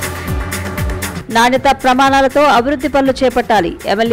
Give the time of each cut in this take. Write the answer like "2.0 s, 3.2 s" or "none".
1.1 s